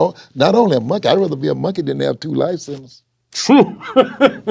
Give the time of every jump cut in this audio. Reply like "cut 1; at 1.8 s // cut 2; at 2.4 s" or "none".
none